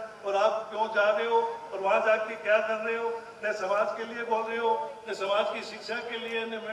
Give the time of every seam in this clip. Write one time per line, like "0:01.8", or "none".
none